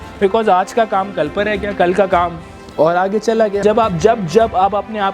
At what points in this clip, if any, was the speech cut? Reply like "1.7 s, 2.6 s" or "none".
3.6 s